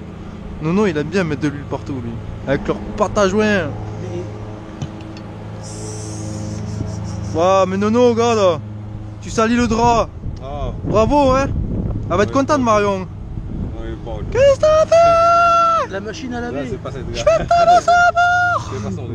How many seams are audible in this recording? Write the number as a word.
one